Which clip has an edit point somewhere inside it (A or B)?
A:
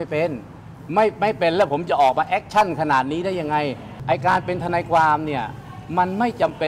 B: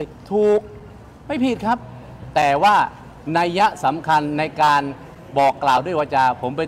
A